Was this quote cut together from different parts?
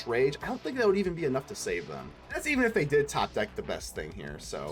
yes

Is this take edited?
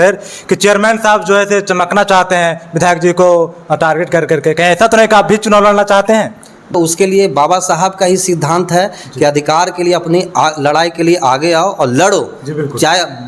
yes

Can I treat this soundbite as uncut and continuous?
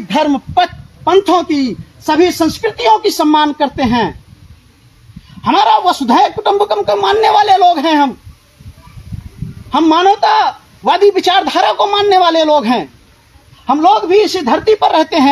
yes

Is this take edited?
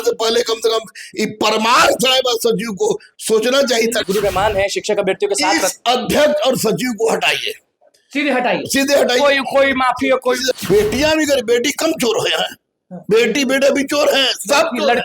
yes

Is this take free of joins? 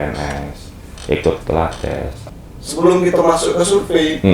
no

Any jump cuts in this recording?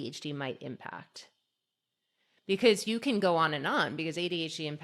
no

